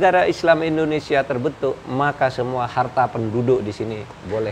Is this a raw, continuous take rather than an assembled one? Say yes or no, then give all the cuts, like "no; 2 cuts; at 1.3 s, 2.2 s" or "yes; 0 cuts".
yes; 0 cuts